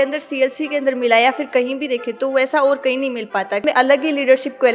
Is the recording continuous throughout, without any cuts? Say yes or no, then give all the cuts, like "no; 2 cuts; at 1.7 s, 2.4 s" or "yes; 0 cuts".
no; 1 cut; at 3.6 s